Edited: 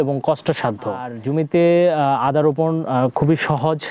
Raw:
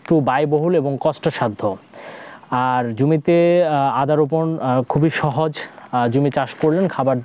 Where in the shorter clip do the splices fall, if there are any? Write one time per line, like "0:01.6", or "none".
0:01.2